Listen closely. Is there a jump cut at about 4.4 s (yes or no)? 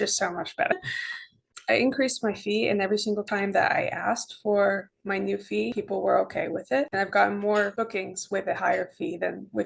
no